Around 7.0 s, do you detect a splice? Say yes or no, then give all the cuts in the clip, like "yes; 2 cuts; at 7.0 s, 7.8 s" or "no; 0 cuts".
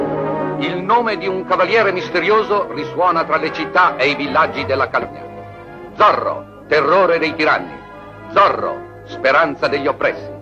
no; 1 cut; at 5.1 s